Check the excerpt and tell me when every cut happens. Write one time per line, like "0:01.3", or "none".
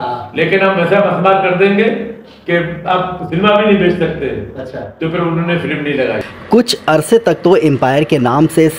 0:06.3